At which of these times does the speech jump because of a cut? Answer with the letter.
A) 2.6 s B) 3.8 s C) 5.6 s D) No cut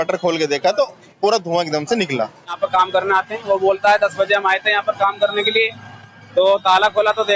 A